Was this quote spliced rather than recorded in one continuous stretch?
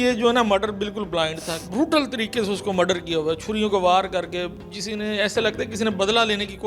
yes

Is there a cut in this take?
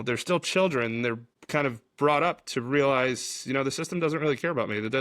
yes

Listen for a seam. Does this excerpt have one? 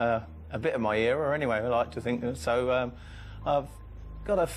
yes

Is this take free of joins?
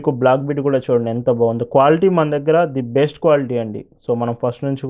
yes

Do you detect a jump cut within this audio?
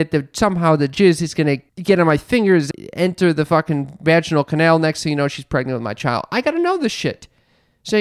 yes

